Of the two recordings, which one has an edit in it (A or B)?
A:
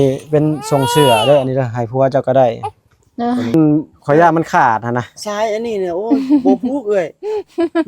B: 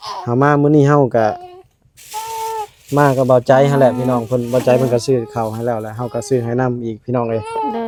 A